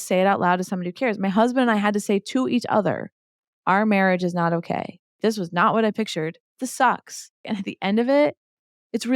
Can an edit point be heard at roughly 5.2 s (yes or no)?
yes